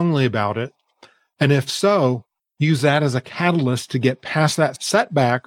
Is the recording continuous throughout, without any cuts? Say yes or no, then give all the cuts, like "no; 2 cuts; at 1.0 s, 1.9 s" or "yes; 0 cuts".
yes; 0 cuts